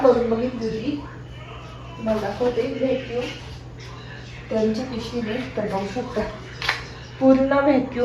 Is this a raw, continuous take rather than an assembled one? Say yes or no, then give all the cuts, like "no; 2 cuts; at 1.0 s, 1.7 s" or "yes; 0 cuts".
yes; 0 cuts